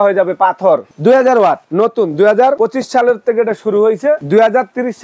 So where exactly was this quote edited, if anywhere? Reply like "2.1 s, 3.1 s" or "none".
0.9 s, 1.6 s, 2.6 s, 4.2 s